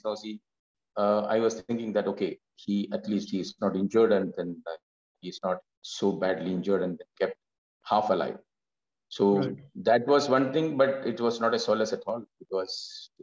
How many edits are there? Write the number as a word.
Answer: zero